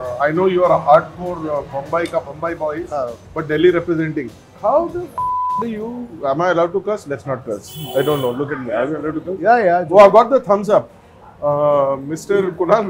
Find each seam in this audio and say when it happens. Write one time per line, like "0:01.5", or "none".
0:04.5